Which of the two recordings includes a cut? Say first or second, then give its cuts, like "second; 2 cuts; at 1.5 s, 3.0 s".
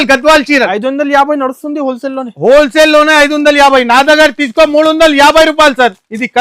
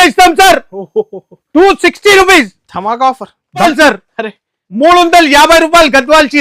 second; 1 cut; at 3.6 s